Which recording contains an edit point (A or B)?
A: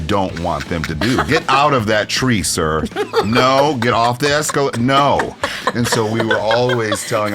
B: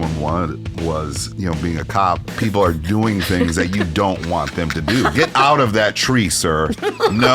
B